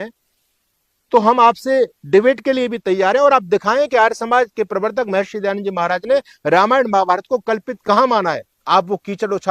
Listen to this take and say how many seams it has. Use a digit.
1